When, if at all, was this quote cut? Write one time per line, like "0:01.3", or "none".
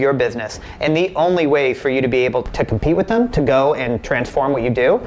none